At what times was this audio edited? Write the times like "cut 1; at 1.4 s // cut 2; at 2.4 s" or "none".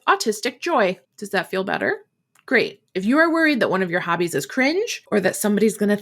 cut 1; at 1.1 s // cut 2; at 5.0 s